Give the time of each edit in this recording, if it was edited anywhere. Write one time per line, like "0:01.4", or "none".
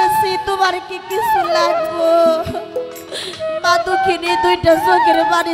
none